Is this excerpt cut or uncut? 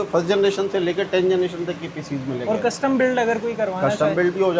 uncut